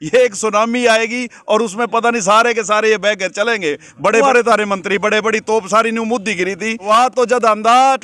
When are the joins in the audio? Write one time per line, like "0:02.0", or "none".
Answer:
0:04.2
0:06.8